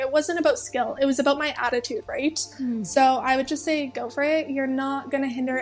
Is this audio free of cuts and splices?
yes; 0 cuts

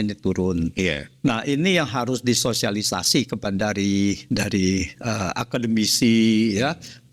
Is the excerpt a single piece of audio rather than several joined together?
yes; 0 cuts

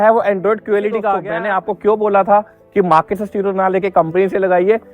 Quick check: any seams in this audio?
yes; 1 cut; at 1.3 s

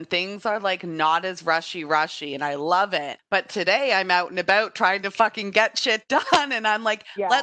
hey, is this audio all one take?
no; 1 cut; at 3.2 s

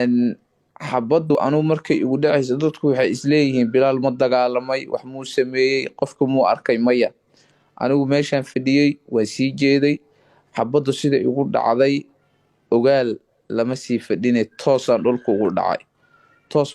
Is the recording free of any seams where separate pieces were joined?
no; 1 cut; at 1.3 s

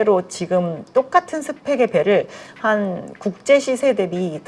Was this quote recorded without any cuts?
yes; 0 cuts

